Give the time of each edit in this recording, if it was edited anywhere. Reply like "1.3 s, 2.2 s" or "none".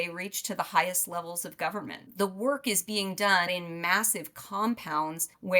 2.0 s, 3.5 s